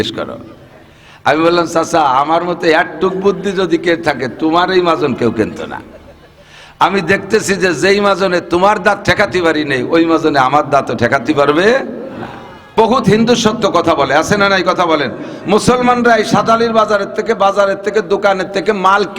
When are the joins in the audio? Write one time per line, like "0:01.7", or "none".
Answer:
0:12.6